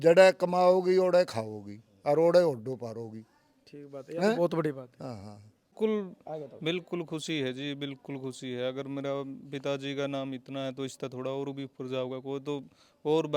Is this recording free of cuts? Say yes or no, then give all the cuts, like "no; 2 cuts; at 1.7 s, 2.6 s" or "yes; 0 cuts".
no; 1 cut; at 5.7 s